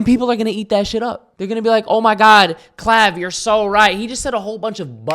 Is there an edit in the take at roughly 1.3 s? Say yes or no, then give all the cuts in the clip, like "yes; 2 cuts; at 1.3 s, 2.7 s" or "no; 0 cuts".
yes; 1 cut; at 1.3 s